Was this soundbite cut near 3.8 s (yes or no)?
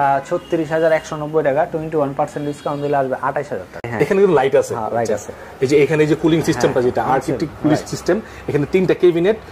yes